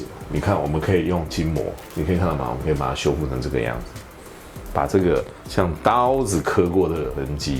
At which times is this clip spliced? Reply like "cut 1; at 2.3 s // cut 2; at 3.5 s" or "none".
none